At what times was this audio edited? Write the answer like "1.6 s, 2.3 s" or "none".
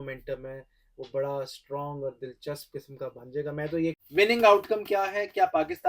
4.0 s